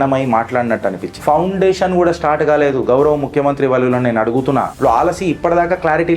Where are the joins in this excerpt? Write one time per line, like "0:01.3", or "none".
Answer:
0:01.2
0:04.7

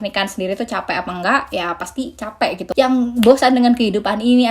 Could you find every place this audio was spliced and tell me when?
0:02.6

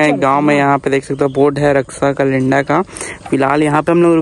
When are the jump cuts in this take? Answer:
none

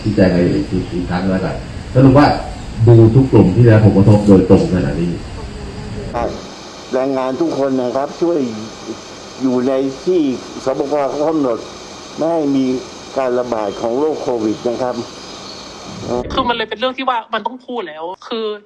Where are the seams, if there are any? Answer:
0:06.2
0:16.2

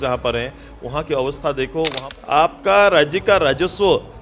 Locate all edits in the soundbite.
0:02.0

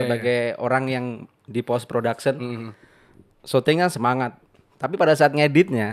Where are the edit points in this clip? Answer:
none

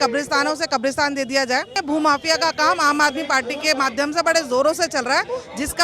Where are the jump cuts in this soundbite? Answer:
0:01.8

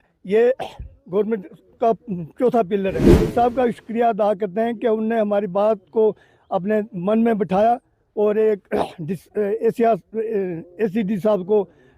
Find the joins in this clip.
0:03.1

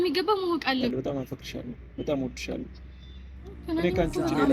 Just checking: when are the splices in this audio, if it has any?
0:00.9

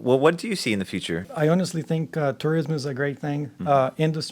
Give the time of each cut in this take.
0:01.3

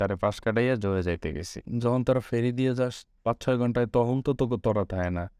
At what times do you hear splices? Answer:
0:01.6

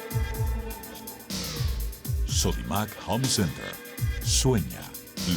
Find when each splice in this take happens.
0:01.0

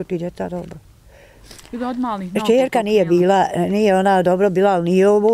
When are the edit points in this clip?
0:01.5

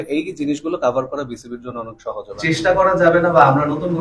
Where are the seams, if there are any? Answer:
0:02.3

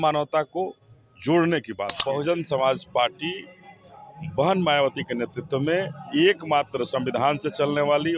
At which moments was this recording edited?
0:01.9

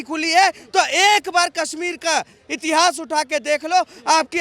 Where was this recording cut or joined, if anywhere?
none

